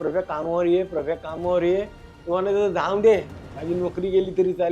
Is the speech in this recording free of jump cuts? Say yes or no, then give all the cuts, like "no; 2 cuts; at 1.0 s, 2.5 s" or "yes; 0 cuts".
yes; 0 cuts